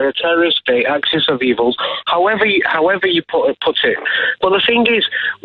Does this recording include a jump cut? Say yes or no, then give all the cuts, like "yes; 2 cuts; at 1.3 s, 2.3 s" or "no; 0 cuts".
yes; 1 cut; at 3.5 s